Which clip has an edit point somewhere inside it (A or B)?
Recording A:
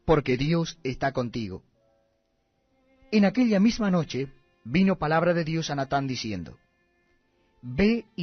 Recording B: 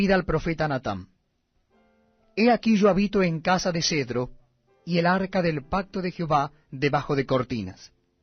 B